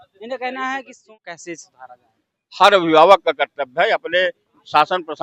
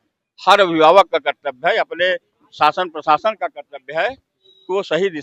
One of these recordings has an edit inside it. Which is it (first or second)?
first